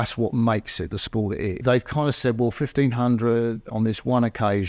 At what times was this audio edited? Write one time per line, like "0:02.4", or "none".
0:01.6